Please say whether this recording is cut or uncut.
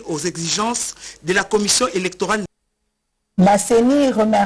cut